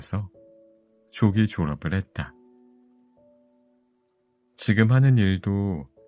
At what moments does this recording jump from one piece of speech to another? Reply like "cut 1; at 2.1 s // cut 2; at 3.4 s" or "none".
cut 1; at 2.3 s // cut 2; at 4.2 s